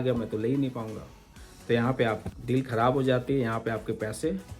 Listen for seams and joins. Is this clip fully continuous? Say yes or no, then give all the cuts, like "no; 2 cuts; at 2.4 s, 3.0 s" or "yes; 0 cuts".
yes; 0 cuts